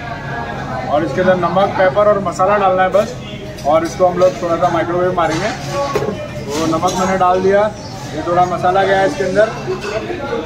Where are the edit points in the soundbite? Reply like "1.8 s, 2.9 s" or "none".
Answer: none